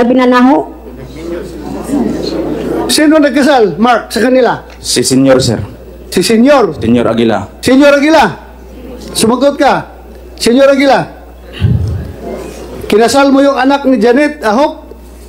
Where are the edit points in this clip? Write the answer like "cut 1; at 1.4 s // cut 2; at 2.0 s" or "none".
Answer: none